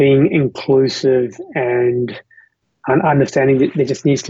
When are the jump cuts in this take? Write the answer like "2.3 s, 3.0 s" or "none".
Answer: 2.6 s